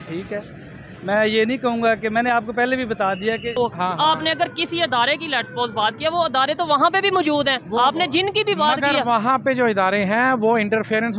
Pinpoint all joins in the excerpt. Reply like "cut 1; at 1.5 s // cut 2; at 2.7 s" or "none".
cut 1; at 3.5 s

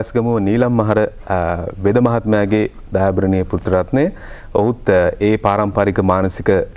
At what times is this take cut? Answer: none

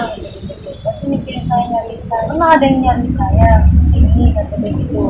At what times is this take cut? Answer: cut 1; at 2.3 s

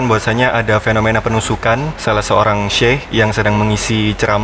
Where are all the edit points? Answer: cut 1; at 1.9 s // cut 2; at 3.0 s

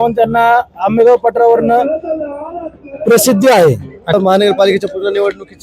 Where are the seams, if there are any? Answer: cut 1; at 4.1 s

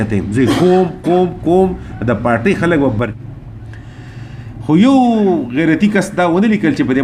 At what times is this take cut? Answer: cut 1; at 3.1 s

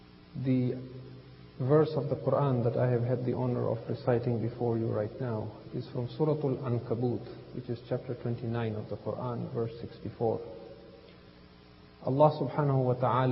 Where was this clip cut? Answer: cut 1; at 9.9 s

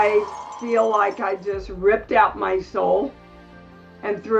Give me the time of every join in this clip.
none

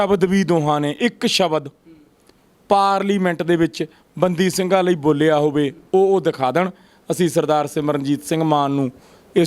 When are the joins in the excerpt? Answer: none

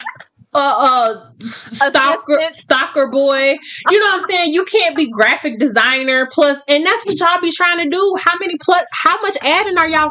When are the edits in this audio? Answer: none

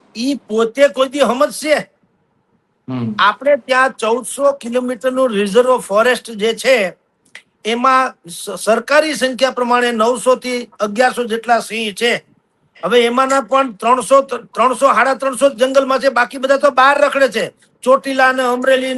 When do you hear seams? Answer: none

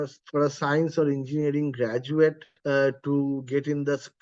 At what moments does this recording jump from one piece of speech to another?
cut 1; at 2.5 s

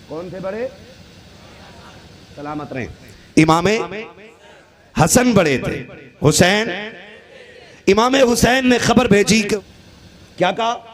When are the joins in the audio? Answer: cut 1; at 9.6 s

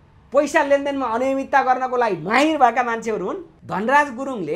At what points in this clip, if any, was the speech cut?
cut 1; at 3.5 s

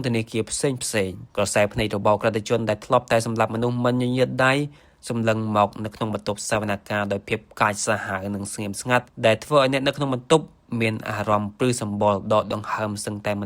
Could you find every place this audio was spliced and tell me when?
cut 1; at 1.2 s

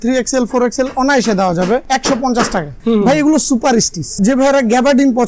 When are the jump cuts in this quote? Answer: cut 1; at 1.8 s // cut 2; at 2.7 s // cut 3; at 4.1 s

